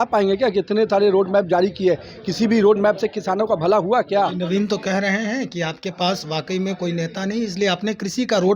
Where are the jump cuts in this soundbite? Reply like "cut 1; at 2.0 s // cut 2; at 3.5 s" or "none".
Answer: cut 1; at 4.3 s

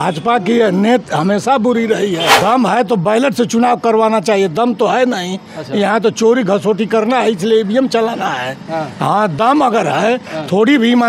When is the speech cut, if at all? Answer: cut 1; at 2.3 s

